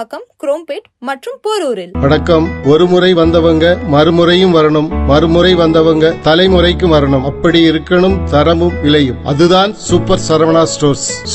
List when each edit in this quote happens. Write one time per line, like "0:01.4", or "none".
0:01.9

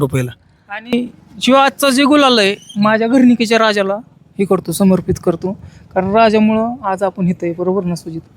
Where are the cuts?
0:00.9

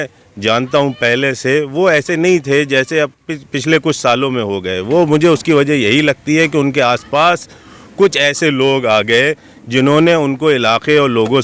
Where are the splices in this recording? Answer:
none

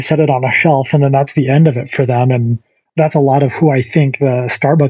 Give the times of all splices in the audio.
none

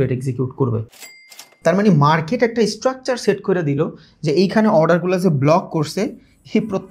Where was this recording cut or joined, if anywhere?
0:01.1

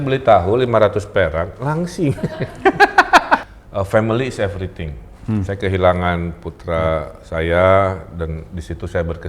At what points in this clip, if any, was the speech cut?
0:03.4

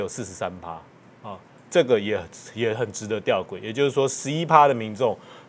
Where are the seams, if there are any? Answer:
none

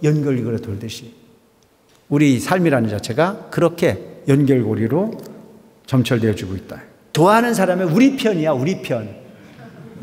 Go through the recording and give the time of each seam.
0:07.1

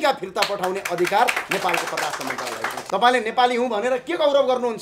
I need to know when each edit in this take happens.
0:02.8

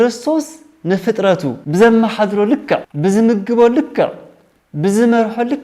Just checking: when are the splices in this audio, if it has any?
0:01.6
0:02.9

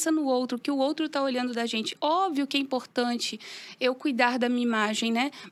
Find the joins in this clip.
none

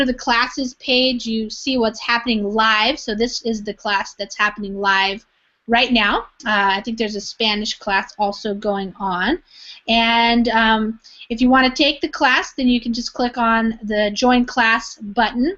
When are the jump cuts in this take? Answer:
0:08.9

